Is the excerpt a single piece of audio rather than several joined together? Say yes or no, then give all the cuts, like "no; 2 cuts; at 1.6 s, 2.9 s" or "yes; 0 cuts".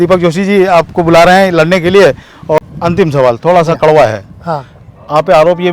no; 1 cut; at 2.6 s